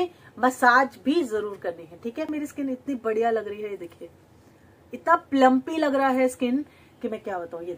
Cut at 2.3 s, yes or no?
yes